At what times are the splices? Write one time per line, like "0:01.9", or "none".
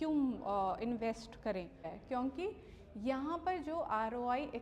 0:01.9